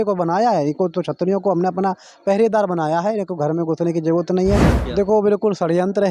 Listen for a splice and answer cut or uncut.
cut